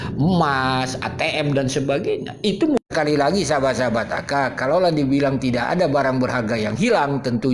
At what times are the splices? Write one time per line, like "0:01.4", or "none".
0:02.8